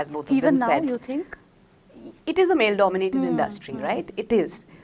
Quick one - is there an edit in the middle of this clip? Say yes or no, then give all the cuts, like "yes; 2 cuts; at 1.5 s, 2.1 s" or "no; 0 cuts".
no; 0 cuts